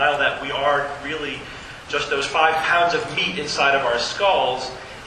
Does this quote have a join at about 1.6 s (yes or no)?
yes